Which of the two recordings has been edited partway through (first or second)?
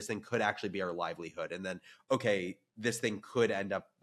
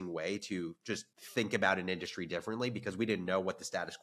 second